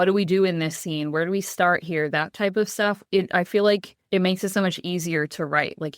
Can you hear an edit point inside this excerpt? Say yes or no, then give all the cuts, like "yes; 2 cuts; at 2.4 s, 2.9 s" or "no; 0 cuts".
yes; 2 cuts; at 3.0 s, 3.9 s